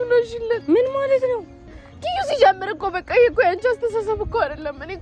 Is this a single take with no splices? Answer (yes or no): yes